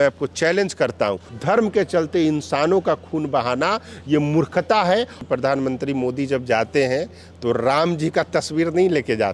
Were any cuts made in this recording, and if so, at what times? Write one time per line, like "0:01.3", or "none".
0:01.3
0:05.2